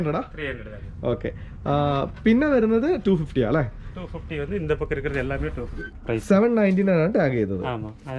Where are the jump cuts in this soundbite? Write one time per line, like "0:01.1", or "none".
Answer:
0:05.8